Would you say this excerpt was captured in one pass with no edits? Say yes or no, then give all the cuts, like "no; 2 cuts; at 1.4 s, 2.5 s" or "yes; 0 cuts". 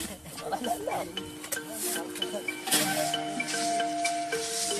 no; 1 cut; at 2.6 s